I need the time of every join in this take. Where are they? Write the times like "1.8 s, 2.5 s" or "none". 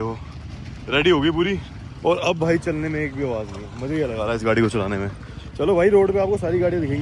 none